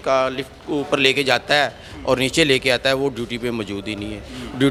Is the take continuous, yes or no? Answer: yes